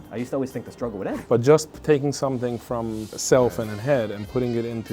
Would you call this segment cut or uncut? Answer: cut